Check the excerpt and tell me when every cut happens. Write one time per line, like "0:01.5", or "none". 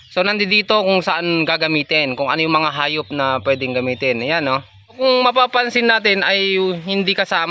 0:05.0